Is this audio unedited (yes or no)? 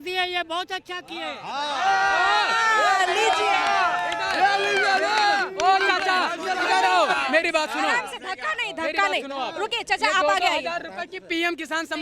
yes